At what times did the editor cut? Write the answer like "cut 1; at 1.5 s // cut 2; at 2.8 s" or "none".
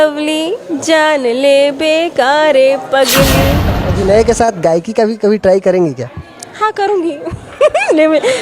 cut 1; at 3.8 s